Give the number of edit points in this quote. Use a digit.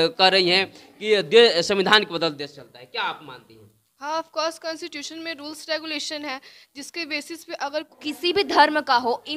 1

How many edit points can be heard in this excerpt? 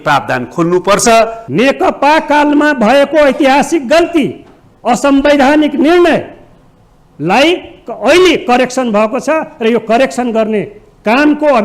1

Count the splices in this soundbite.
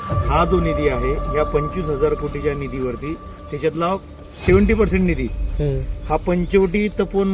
0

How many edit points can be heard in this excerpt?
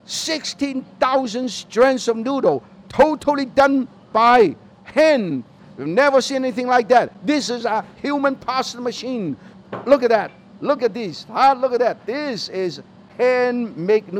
2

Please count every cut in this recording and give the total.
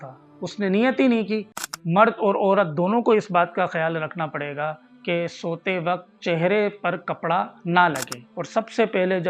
2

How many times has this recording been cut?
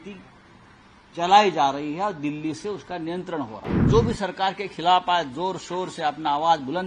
1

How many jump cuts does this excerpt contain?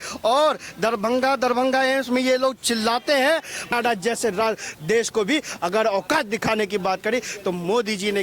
1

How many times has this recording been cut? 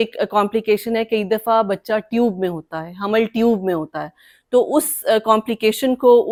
0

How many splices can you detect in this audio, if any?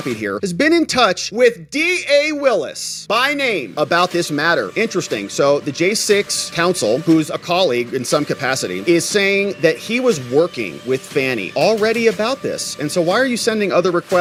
0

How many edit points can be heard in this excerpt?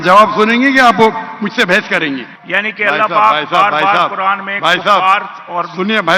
1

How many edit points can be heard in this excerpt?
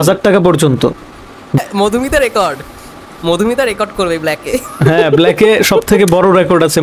1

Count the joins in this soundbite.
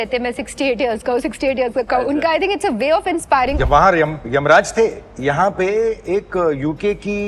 1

